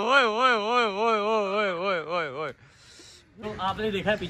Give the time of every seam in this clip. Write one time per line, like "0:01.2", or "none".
none